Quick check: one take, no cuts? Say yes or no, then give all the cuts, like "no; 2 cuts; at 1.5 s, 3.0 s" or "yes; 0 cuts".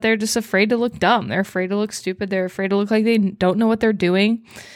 yes; 0 cuts